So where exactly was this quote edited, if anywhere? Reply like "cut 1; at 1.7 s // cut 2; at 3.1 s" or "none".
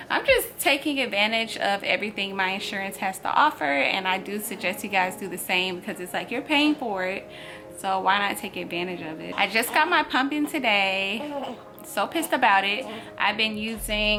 none